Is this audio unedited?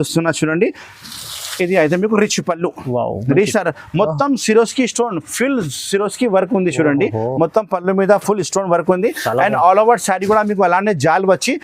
no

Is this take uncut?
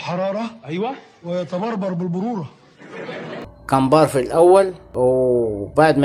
yes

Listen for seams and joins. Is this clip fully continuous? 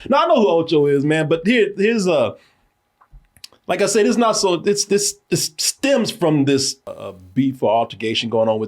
no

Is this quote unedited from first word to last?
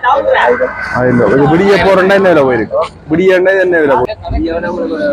no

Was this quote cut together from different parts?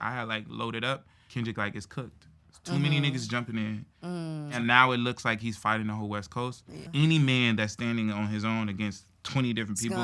yes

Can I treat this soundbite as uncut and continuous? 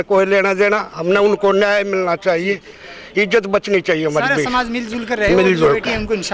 yes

